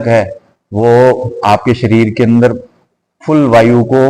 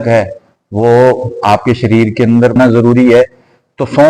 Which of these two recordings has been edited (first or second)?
second